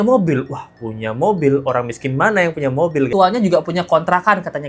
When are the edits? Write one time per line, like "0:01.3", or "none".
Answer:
0:03.1